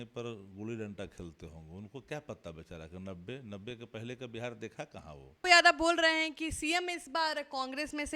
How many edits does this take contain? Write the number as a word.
one